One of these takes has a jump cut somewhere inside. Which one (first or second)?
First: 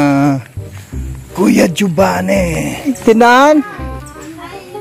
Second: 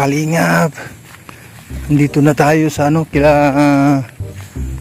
first